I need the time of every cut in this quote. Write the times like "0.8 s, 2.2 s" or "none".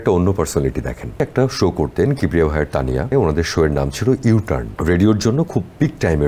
1.2 s, 3.1 s, 4.7 s